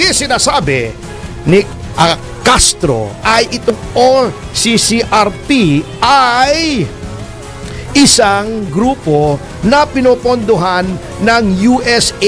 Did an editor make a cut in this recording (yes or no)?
no